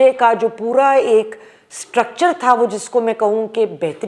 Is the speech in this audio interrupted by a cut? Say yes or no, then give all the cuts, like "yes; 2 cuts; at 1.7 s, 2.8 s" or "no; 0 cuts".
no; 0 cuts